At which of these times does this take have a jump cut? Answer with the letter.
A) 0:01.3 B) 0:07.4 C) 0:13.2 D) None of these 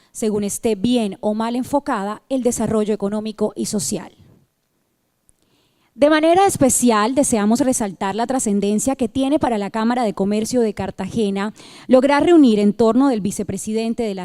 A